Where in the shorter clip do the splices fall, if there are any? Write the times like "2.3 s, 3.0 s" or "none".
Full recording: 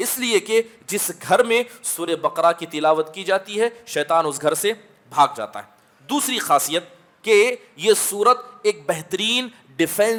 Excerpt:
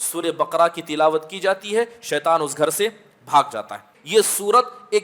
3.9 s